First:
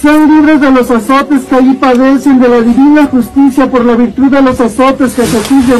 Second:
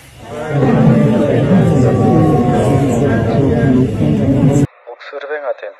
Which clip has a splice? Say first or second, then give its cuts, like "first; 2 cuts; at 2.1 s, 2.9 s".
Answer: second; 1 cut; at 4.7 s